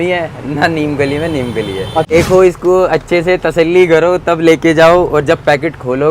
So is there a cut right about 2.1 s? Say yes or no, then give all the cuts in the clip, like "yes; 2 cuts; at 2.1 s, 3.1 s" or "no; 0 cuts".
yes; 1 cut; at 2.1 s